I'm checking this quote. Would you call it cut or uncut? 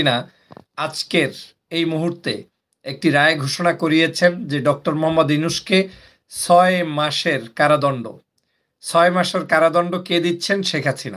uncut